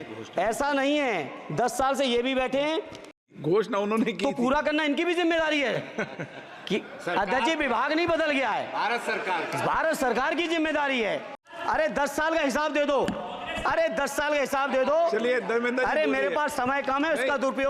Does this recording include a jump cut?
yes; 2 cuts; at 3.3 s, 11.4 s

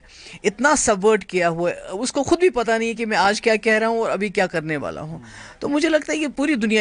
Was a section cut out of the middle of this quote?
no; 0 cuts

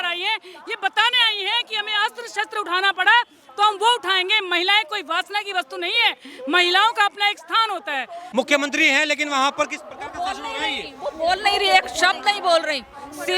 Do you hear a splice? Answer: yes; 1 cut; at 8.2 s

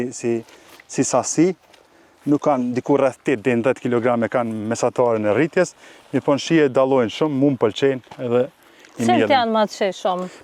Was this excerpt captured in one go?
yes; 0 cuts

